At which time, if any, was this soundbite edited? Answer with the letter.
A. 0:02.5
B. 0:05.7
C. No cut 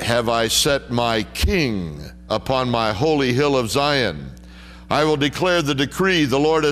B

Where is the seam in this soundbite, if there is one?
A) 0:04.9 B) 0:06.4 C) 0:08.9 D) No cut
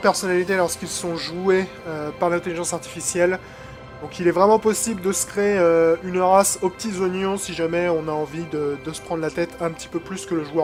D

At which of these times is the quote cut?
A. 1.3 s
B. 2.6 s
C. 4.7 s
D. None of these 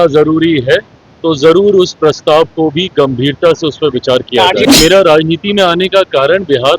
C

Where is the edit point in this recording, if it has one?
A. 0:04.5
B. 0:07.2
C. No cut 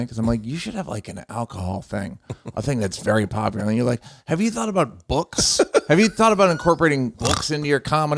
B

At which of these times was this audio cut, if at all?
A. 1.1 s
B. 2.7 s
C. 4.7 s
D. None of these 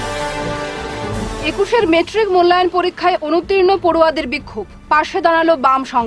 A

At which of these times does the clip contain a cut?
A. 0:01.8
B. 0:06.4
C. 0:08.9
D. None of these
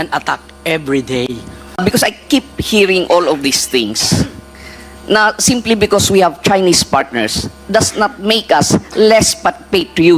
A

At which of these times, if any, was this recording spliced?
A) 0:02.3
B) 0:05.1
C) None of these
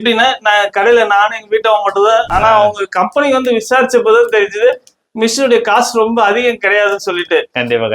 A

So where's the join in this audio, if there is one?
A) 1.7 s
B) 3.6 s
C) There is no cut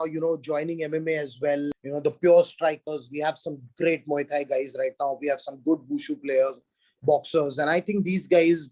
A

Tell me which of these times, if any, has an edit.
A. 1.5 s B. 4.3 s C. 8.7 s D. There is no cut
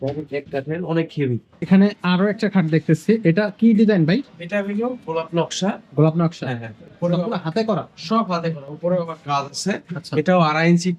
A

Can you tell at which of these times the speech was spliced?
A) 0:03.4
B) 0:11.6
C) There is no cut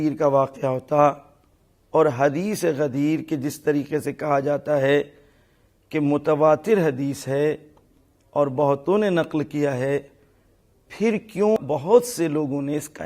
B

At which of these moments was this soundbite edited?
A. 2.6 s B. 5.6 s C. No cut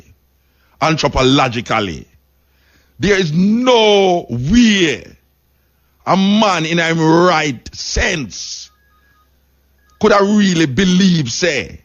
C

